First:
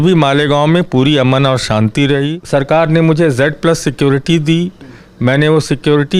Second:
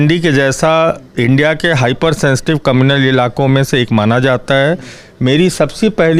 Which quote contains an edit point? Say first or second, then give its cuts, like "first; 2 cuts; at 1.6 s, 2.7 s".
first; 1 cut; at 2.4 s